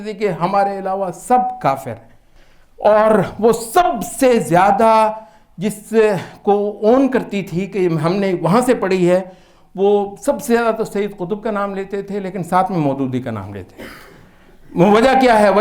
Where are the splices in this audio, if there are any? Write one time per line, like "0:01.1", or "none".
none